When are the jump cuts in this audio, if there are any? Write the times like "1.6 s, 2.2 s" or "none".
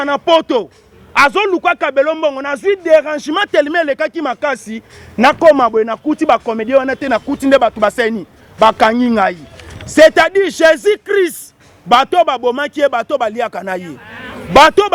none